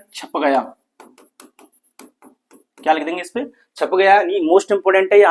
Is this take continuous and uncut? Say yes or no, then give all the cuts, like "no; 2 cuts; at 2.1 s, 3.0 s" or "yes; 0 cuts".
yes; 0 cuts